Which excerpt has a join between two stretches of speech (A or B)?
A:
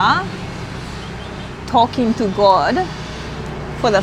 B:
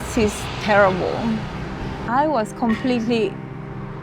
B